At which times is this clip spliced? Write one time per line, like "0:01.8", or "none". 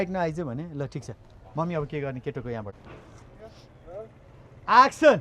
0:02.8